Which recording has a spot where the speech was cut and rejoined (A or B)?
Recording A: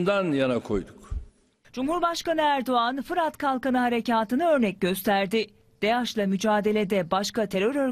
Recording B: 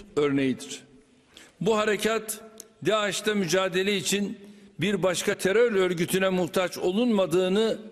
B